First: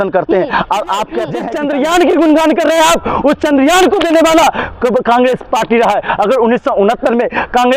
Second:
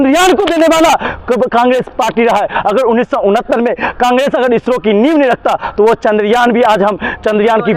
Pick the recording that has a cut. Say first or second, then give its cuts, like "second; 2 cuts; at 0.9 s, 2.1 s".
first; 1 cut; at 1.4 s